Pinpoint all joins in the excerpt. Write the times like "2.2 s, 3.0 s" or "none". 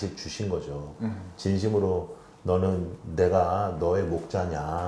none